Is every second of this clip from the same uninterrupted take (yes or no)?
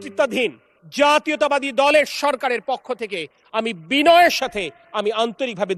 yes